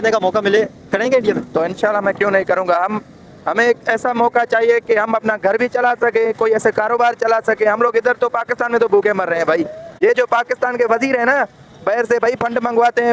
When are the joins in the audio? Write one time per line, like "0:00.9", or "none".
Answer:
none